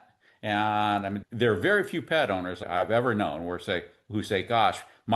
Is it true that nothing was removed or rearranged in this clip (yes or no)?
no